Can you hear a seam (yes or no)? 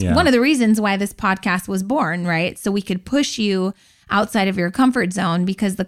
no